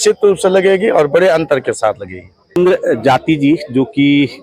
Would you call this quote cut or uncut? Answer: uncut